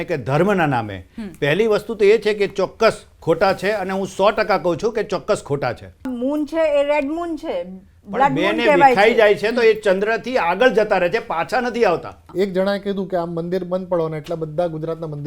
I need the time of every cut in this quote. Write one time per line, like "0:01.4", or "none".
0:06.1
0:12.2